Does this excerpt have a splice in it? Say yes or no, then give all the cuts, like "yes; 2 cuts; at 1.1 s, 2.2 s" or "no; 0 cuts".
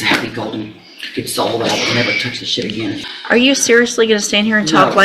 yes; 1 cut; at 3.1 s